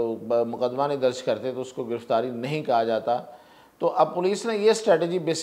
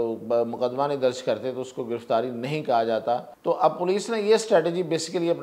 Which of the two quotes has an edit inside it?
second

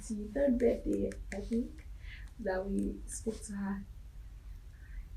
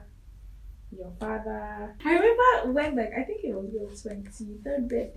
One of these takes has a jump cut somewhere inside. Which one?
second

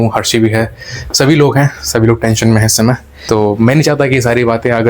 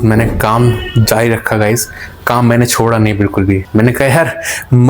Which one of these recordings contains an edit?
first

